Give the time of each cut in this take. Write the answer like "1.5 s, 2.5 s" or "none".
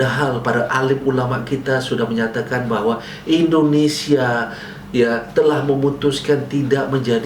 none